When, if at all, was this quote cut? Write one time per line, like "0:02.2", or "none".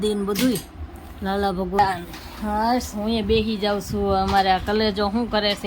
0:01.8